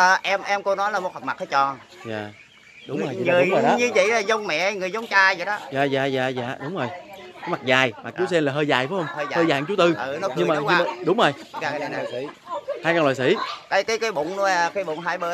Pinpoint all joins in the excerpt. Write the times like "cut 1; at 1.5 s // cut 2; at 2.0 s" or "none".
none